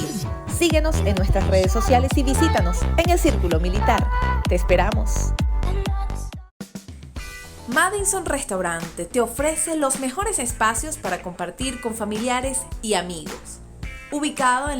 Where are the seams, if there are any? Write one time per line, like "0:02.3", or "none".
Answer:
0:06.2